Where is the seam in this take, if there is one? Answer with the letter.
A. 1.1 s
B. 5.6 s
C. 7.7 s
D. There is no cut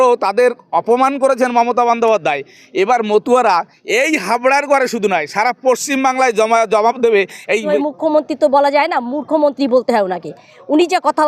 C